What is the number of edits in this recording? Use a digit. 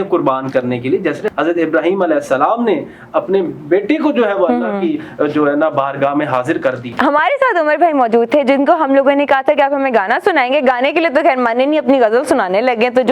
2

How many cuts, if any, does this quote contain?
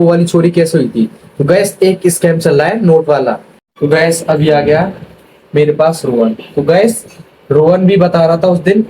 1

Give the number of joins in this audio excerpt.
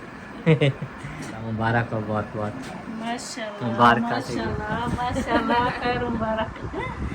1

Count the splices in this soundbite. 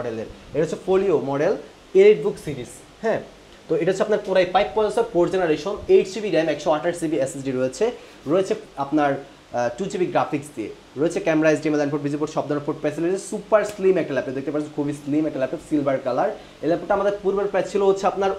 0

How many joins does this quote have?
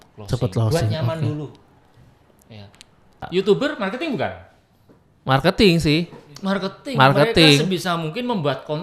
1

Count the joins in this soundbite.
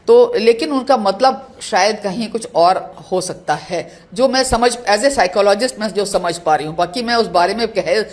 0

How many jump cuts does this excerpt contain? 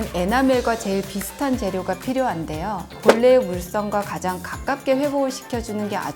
1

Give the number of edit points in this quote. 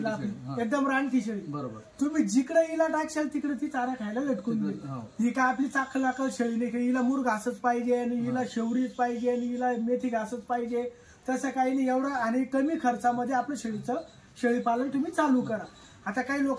0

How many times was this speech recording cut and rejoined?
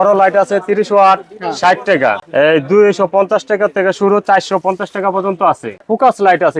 2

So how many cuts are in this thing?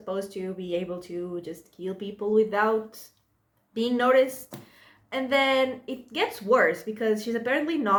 0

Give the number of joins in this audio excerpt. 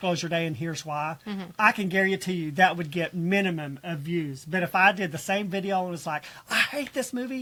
0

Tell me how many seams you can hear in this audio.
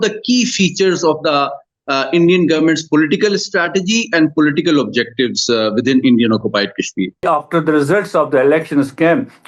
1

